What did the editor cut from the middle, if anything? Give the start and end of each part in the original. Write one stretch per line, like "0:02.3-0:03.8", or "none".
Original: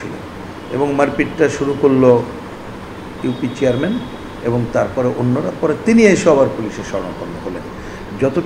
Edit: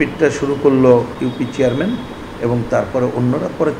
0:02.3-0:03.2